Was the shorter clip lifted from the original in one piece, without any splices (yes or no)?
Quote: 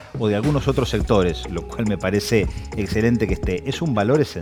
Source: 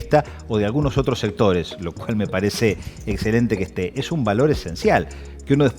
yes